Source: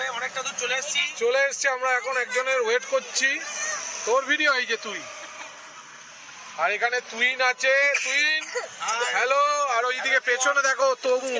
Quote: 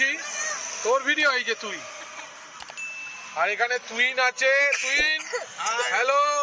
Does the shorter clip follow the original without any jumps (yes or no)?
yes